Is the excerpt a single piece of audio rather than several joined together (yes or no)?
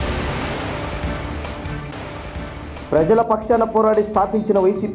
no